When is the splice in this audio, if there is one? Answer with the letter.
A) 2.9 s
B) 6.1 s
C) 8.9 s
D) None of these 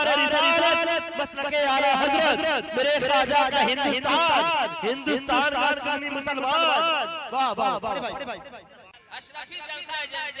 C